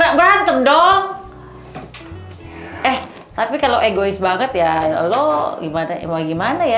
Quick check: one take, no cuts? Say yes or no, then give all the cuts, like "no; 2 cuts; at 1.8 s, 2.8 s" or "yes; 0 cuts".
yes; 0 cuts